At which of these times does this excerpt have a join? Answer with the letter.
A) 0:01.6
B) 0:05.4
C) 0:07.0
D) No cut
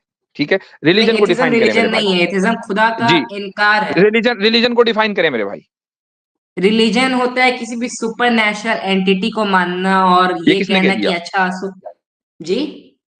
D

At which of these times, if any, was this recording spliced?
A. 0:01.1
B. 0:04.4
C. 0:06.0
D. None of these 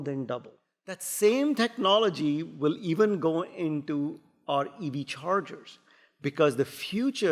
A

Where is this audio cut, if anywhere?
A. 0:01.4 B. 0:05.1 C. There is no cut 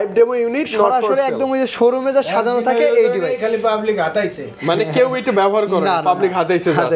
C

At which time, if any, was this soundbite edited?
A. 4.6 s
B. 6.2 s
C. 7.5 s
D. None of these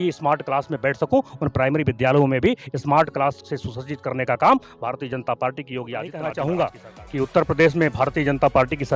B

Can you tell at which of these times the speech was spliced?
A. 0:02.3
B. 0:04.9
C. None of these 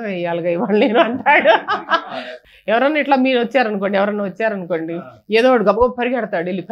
A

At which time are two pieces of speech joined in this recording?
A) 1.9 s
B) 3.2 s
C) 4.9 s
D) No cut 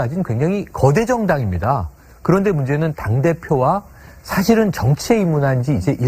A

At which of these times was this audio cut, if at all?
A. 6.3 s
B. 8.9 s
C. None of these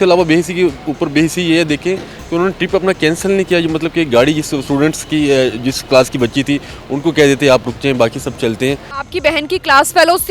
B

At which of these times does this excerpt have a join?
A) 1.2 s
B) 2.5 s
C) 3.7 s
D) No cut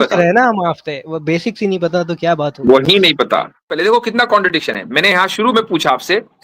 C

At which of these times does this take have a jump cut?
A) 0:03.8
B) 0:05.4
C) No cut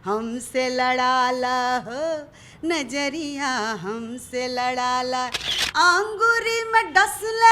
B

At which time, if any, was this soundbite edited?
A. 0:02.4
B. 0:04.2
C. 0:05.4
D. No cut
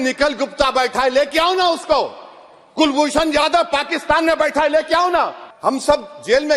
C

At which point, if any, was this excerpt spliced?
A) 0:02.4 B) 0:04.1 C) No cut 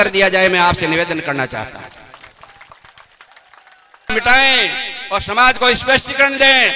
B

